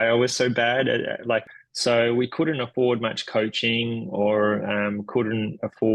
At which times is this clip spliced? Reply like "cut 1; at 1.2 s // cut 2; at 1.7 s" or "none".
cut 1; at 1.5 s